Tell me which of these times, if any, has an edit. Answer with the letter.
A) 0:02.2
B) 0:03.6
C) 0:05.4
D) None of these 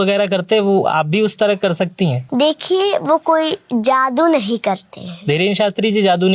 A